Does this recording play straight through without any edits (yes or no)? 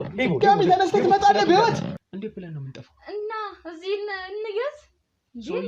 no